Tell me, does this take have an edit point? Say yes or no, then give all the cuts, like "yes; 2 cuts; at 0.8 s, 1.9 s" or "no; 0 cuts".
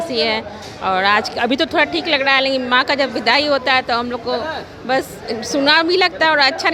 no; 0 cuts